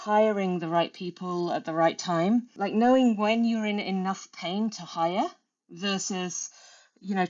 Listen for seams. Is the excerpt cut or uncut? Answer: cut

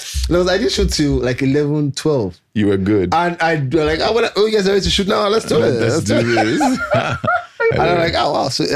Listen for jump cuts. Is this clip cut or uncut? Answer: cut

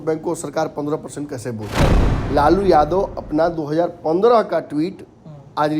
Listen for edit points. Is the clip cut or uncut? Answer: cut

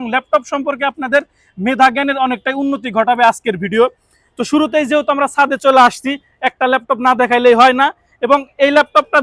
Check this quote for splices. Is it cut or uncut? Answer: uncut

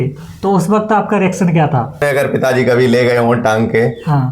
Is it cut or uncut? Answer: cut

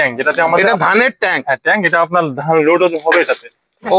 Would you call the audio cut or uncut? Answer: uncut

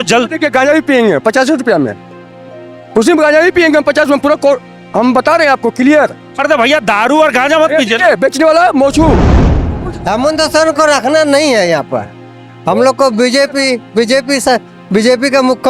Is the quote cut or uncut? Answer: cut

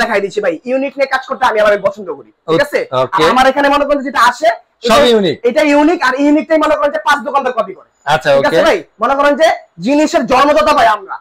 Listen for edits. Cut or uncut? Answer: uncut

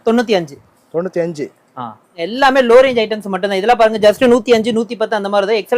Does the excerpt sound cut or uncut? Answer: cut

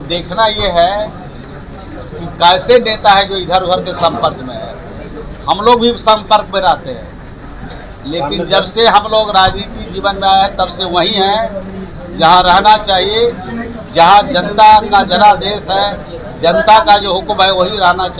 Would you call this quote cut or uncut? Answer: uncut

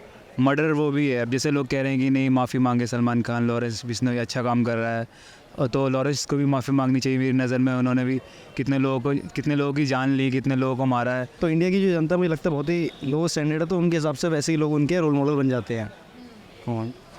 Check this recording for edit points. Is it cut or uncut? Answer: cut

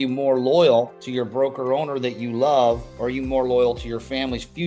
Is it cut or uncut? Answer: cut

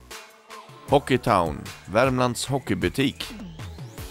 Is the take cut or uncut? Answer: cut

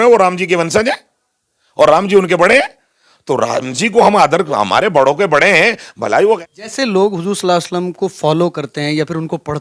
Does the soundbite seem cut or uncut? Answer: cut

